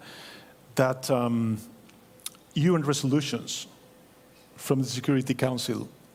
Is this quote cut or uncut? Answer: uncut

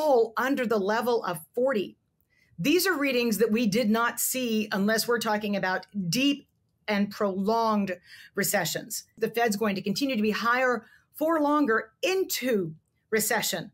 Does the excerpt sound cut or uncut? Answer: cut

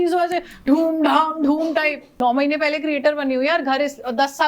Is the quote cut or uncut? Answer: cut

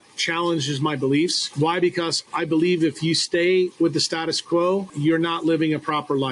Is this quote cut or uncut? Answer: cut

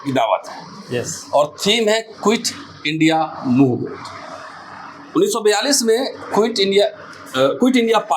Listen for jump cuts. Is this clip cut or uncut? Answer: uncut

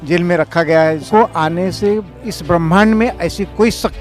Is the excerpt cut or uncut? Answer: cut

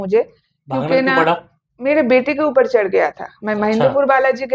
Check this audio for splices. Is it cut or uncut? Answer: uncut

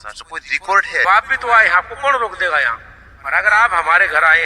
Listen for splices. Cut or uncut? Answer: cut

